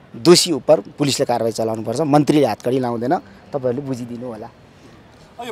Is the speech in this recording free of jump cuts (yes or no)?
yes